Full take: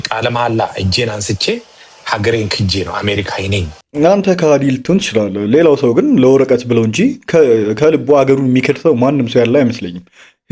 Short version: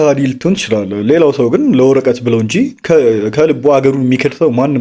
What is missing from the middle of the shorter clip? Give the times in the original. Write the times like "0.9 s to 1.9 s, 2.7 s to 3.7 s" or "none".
none